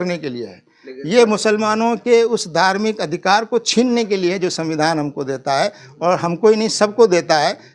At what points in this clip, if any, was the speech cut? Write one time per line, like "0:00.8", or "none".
none